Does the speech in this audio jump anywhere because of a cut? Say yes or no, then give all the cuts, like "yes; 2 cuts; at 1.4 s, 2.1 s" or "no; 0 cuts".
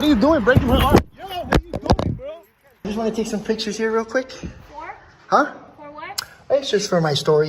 yes; 1 cut; at 2.9 s